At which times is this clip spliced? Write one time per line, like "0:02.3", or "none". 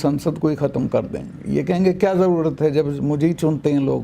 none